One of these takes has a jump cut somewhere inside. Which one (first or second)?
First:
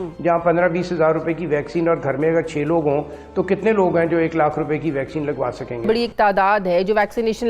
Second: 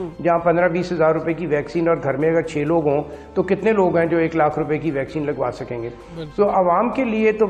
first